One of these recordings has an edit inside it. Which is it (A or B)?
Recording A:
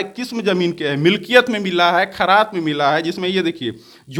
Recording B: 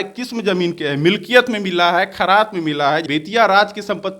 B